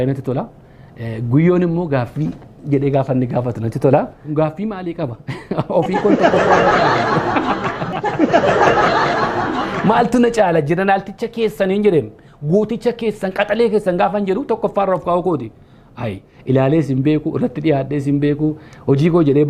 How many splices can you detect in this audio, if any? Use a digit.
2